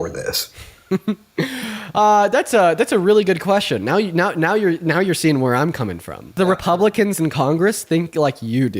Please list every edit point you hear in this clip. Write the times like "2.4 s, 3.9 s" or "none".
6.3 s